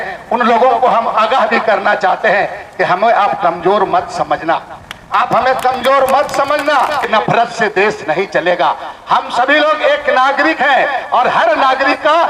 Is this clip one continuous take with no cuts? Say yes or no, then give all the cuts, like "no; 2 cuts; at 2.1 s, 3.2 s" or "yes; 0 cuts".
no; 1 cut; at 7.1 s